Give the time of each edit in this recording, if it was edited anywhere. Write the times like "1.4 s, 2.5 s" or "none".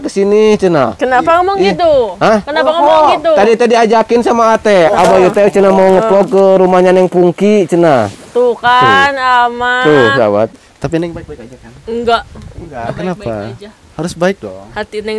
10.7 s